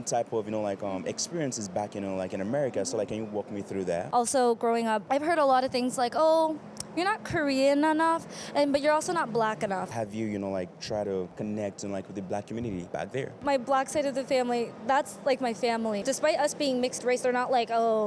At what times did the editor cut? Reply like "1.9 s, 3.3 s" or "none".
4.1 s, 9.9 s, 11.3 s, 13.2 s, 16.0 s